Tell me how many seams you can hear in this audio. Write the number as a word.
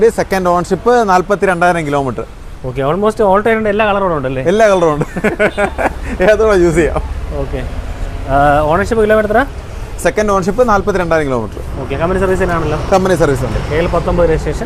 zero